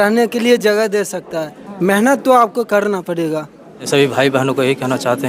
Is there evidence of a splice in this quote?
yes; 1 cut; at 3.9 s

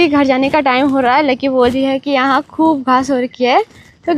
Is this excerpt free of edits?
yes; 0 cuts

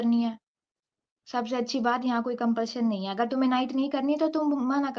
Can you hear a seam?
no; 0 cuts

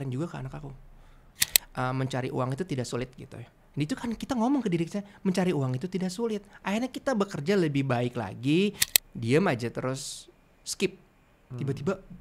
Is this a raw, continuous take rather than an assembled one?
no; 2 cuts; at 1.4 s, 8.9 s

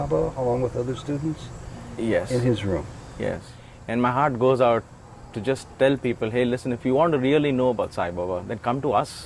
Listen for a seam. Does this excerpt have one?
yes; 1 cut; at 3.5 s

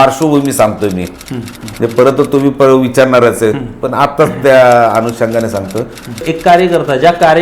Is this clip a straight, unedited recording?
no; 1 cut; at 6.3 s

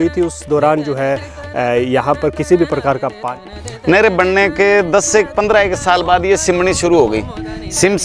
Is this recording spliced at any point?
yes; 1 cut; at 3.4 s

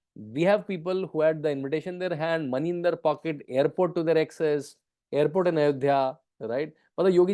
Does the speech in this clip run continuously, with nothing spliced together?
yes; 0 cuts

